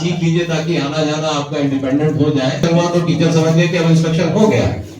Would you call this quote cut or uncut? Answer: cut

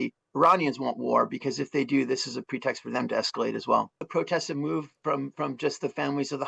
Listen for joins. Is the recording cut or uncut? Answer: cut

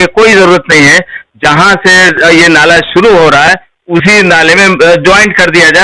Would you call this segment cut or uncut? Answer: uncut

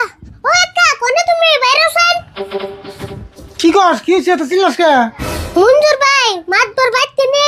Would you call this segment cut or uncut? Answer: uncut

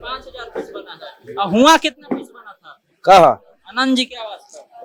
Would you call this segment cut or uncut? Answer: uncut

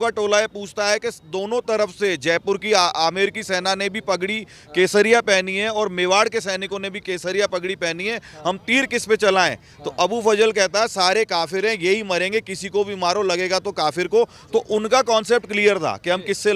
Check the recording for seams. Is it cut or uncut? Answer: uncut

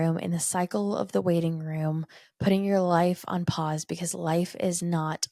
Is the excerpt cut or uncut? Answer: uncut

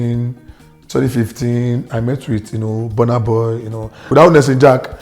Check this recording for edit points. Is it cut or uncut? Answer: cut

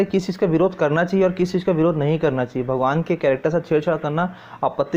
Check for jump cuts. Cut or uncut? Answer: uncut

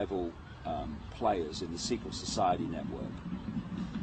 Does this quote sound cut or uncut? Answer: cut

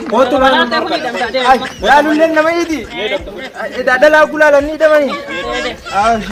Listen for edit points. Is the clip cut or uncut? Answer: uncut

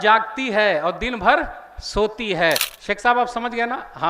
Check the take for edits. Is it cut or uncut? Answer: cut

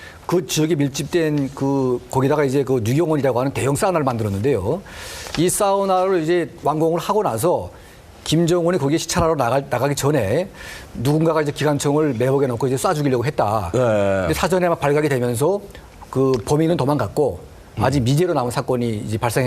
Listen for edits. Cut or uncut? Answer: cut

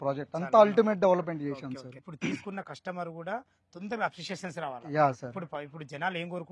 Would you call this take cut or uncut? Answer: cut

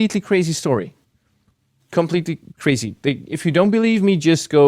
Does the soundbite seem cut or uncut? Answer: uncut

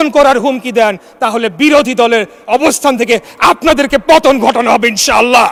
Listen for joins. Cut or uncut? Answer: uncut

